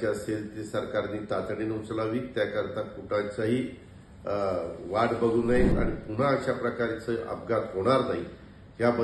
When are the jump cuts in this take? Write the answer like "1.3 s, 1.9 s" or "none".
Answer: 5.8 s